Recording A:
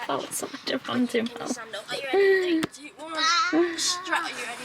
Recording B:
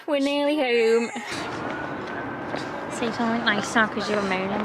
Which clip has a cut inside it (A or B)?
B